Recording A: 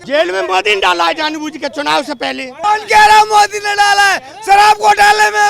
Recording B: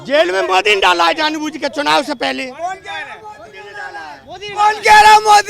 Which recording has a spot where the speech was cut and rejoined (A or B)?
A